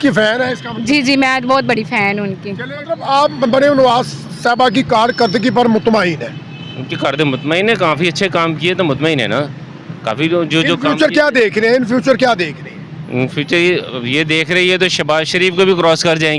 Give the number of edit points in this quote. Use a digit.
1